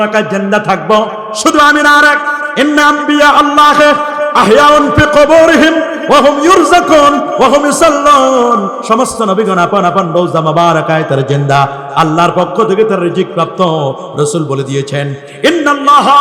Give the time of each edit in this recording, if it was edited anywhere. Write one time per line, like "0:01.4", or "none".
none